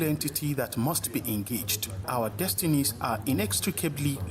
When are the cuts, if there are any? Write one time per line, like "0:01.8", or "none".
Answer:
0:02.0